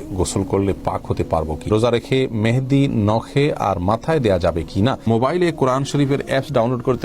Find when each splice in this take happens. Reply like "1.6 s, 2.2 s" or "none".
1.7 s, 5.1 s